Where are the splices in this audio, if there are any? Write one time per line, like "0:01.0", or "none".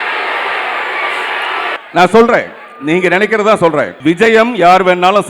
0:01.8
0:03.9